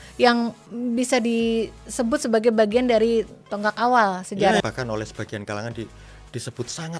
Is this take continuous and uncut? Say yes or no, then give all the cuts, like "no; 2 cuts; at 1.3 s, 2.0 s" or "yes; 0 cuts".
no; 1 cut; at 4.6 s